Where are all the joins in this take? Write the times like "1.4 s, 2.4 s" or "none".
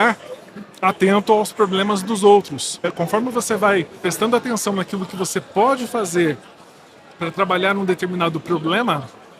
2.9 s, 4.0 s